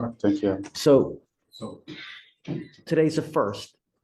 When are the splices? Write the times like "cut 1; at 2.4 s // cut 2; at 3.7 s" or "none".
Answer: none